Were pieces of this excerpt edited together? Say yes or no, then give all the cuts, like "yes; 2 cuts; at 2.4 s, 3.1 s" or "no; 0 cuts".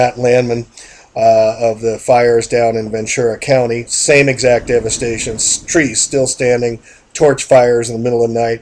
yes; 1 cut; at 3.2 s